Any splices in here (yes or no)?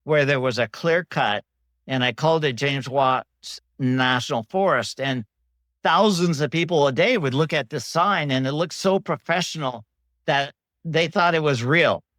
no